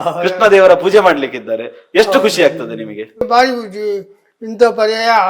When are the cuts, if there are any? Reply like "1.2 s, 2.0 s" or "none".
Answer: 3.2 s